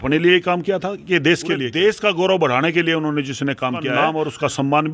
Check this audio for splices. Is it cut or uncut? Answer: cut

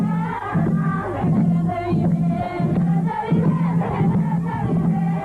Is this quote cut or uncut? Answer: uncut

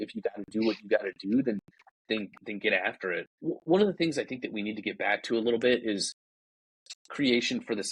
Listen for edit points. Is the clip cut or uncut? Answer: cut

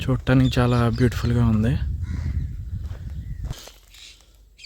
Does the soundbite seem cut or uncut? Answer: cut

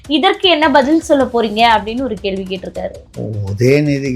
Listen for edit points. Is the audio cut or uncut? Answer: cut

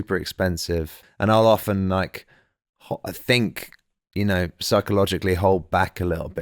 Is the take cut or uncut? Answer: cut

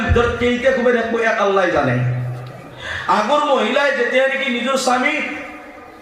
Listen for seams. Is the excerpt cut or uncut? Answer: uncut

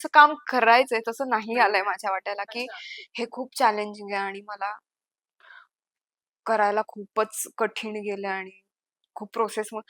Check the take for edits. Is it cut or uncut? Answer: uncut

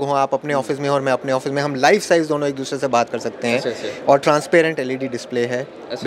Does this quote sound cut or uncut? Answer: uncut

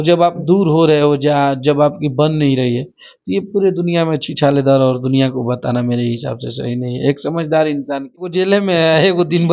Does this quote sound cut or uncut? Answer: cut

